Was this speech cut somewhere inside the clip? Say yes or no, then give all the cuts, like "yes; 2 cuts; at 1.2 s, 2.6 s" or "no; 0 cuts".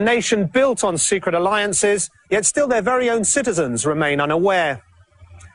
yes; 1 cut; at 1.0 s